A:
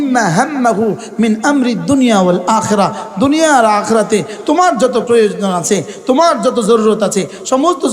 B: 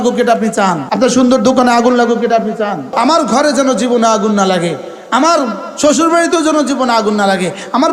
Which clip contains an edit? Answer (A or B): B